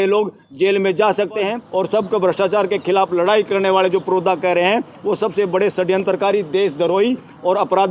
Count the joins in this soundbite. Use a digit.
1